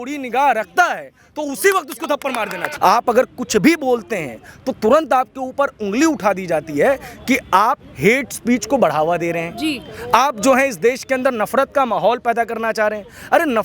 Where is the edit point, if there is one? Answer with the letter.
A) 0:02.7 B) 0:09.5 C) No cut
A